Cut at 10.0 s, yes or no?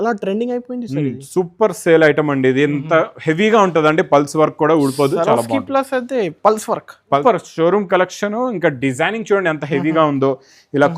no